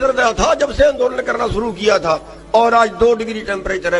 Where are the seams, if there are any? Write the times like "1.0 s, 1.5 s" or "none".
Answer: none